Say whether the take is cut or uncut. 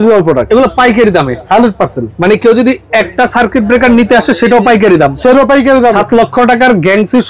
cut